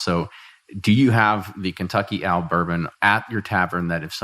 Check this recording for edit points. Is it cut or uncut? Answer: cut